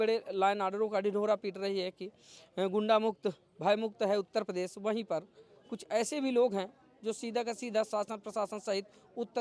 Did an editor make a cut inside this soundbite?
no; 0 cuts

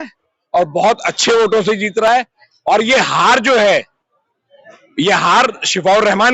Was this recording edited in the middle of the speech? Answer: no; 0 cuts

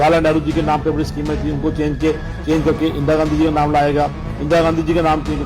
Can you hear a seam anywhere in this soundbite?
no; 0 cuts

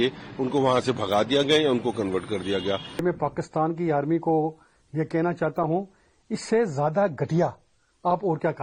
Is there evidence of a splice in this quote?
yes; 1 cut; at 3.0 s

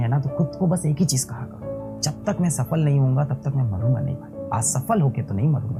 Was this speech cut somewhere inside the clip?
no; 0 cuts

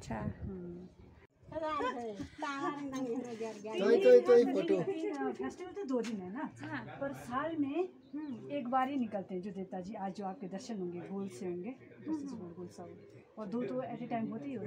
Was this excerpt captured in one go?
no; 1 cut; at 1.5 s

